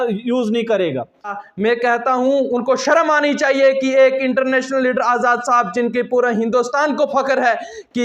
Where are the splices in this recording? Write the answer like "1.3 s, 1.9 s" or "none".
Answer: 1.4 s